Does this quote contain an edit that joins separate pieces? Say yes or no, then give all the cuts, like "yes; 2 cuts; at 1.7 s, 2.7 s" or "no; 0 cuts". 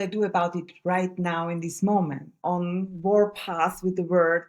yes; 1 cut; at 2.4 s